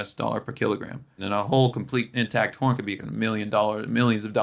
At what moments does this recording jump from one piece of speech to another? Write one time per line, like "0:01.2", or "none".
0:01.2
0:03.0